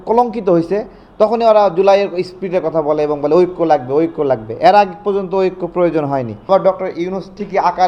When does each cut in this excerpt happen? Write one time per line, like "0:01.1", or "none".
0:06.5